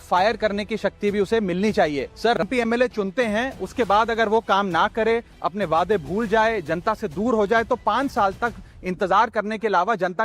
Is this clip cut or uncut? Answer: cut